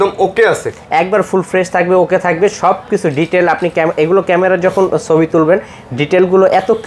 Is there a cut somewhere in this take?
no; 0 cuts

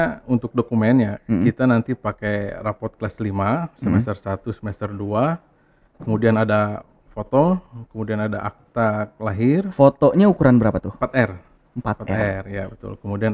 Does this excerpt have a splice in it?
no; 0 cuts

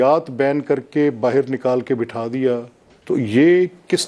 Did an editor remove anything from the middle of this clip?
no; 0 cuts

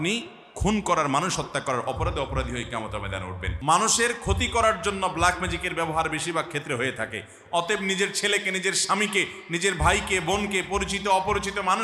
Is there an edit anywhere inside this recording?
yes; 1 cut; at 3.5 s

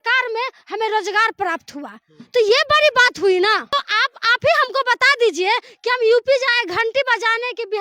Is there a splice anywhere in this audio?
yes; 1 cut; at 3.7 s

